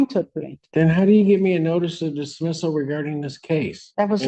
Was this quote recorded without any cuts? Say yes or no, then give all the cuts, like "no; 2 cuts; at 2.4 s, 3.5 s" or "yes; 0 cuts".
yes; 0 cuts